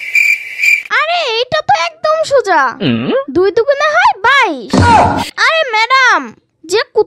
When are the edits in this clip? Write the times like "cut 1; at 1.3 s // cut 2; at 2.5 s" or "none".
cut 1; at 5.3 s